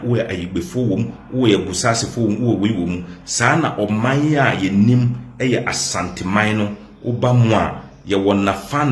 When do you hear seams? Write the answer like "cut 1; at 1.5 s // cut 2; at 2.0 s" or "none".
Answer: none